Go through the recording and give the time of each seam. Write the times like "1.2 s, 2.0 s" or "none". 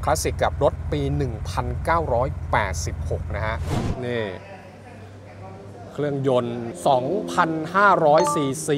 3.7 s